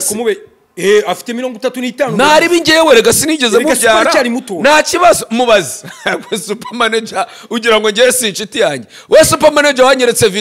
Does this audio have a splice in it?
no; 0 cuts

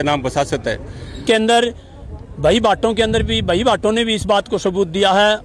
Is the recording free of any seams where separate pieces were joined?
no; 1 cut; at 1.2 s

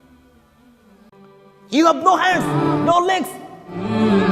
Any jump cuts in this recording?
yes; 1 cut; at 1.1 s

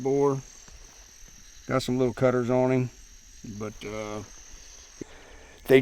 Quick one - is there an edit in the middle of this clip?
yes; 1 cut; at 4.8 s

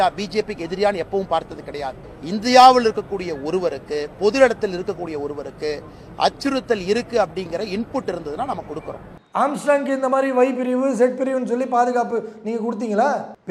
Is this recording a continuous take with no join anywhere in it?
yes; 0 cuts

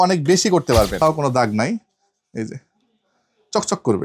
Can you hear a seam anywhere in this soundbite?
yes; 1 cut; at 1.0 s

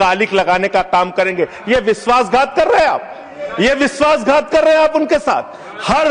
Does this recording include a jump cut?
no; 0 cuts

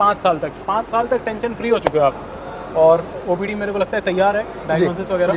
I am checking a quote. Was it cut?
no; 0 cuts

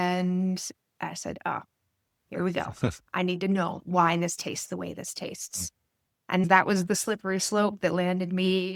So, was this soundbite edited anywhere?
no; 0 cuts

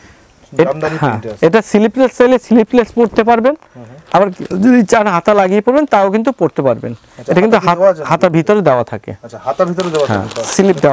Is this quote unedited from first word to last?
yes; 0 cuts

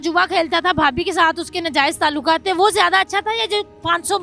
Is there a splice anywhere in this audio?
no; 0 cuts

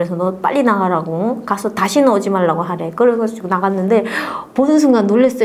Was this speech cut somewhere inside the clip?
no; 0 cuts

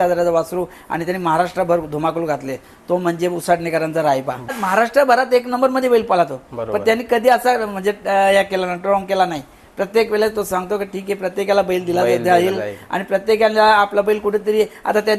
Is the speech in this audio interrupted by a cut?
yes; 1 cut; at 4.6 s

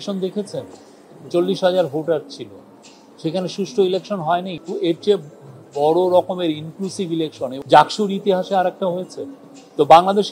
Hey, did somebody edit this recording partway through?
yes; 2 cuts; at 4.6 s, 7.6 s

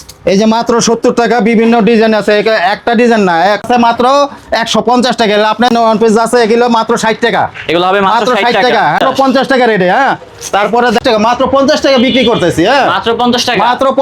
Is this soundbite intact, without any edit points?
no; 4 cuts; at 3.6 s, 5.7 s, 9.0 s, 11.0 s

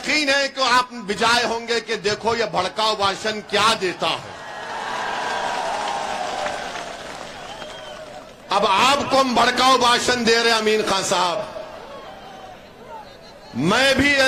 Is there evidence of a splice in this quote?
no; 0 cuts

